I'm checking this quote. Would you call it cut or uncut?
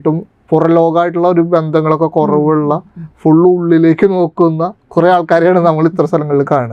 uncut